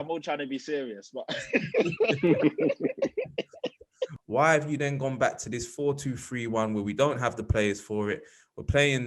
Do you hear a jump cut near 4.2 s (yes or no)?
yes